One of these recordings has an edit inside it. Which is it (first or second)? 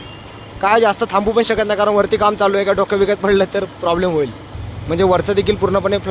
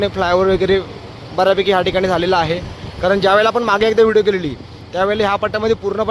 first